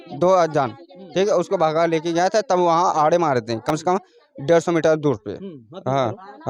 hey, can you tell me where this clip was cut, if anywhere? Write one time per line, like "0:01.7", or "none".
none